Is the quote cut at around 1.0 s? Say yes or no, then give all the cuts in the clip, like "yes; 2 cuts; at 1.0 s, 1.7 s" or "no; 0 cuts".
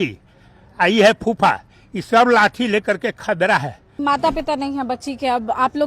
no; 1 cut; at 3.9 s